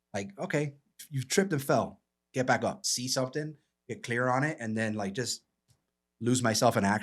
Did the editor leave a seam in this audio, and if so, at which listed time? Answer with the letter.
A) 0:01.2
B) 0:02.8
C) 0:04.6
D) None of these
B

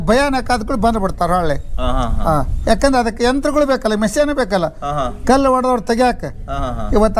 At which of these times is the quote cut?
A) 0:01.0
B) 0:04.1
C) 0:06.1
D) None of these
D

